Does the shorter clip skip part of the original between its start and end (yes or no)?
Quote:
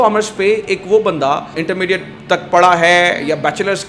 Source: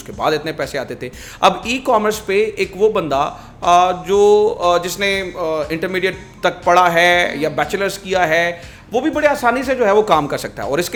yes